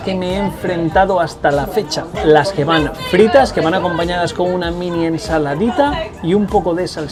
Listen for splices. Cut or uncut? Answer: uncut